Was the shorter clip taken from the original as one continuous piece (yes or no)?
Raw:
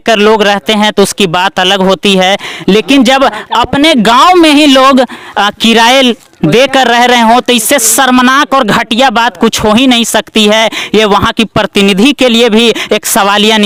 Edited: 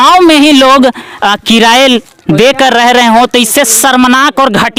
yes